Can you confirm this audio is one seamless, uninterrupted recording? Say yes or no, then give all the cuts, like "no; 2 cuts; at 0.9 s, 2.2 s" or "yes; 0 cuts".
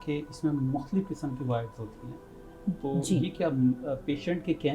yes; 0 cuts